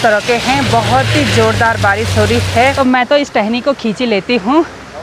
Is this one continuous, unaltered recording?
no; 1 cut; at 2.7 s

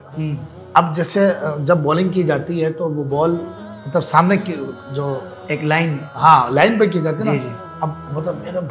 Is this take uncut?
yes; 0 cuts

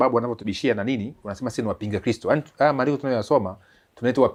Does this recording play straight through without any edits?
yes; 0 cuts

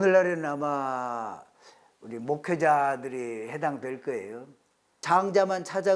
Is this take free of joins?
no; 1 cut; at 4.7 s

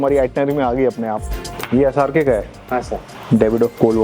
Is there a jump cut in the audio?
yes; 2 cuts; at 1.5 s, 3.1 s

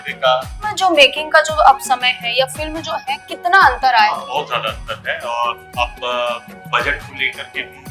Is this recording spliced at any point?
yes; 2 cuts; at 0.8 s, 4.2 s

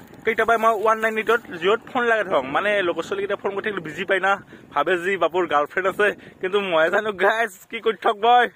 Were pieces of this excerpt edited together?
no; 0 cuts

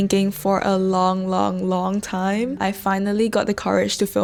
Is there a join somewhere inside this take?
no; 0 cuts

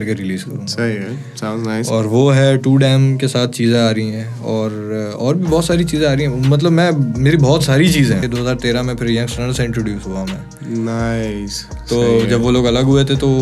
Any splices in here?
yes; 1 cut; at 8.3 s

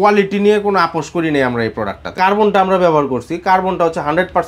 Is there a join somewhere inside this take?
yes; 1 cut; at 2.1 s

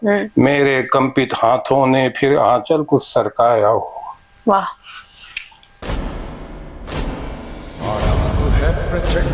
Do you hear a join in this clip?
yes; 1 cut; at 5.7 s

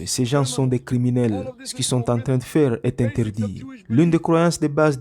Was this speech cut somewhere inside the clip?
no; 0 cuts

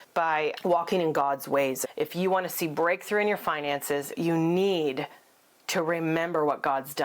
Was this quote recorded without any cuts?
no; 2 cuts; at 1.8 s, 4.1 s

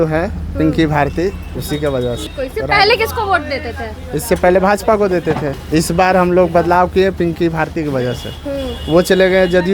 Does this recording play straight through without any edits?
no; 2 cuts; at 2.3 s, 5.5 s

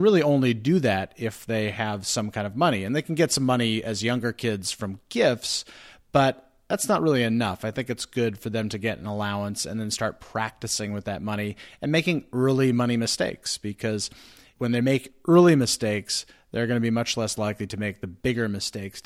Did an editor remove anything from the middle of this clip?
no; 0 cuts

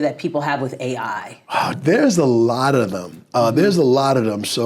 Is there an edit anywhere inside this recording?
yes; 1 cut; at 1.7 s

